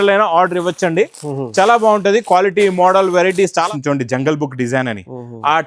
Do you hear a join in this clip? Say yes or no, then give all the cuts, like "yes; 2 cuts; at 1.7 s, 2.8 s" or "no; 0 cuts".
yes; 1 cut; at 3.7 s